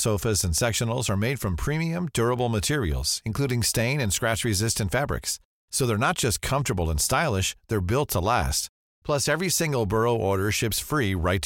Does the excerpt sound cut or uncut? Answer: uncut